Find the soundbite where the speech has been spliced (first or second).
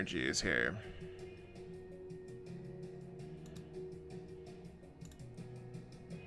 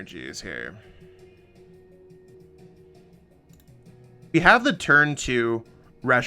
second